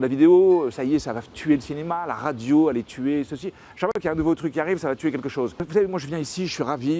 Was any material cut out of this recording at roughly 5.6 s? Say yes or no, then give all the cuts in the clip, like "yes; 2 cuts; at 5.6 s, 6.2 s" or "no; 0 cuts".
yes; 1 cut; at 5.6 s